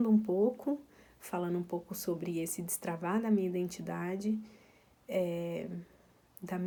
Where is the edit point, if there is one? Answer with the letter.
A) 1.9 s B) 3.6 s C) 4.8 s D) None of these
D